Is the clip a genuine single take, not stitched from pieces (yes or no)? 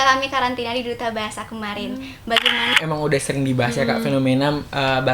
no